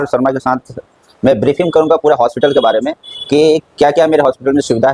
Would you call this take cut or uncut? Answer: uncut